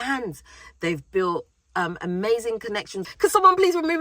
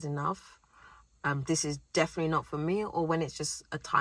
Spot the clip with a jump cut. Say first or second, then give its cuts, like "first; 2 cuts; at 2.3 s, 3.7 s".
first; 1 cut; at 3.0 s